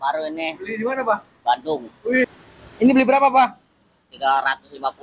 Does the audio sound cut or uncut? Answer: cut